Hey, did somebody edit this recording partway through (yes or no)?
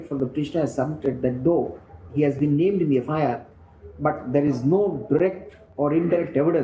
no